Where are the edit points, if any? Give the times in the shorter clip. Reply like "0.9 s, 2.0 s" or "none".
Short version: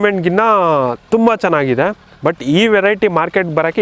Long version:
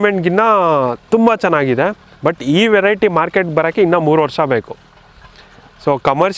none